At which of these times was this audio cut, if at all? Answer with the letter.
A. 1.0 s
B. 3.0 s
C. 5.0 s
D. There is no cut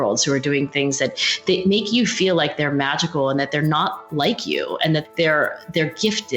C